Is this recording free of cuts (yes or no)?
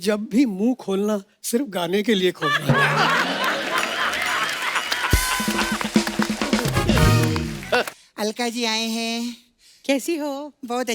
no